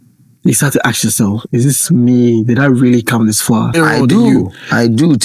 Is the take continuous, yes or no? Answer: no